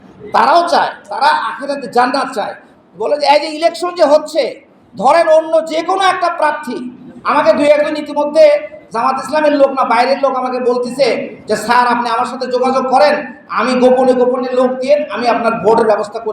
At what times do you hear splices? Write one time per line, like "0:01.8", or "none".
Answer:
0:02.7